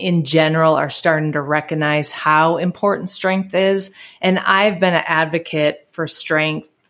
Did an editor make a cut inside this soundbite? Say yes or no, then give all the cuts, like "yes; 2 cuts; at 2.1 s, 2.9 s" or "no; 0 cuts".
no; 0 cuts